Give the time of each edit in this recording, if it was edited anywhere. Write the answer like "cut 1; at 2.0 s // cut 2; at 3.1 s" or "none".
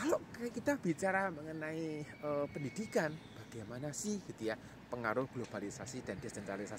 none